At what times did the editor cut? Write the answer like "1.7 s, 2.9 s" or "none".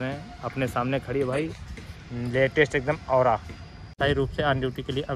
3.9 s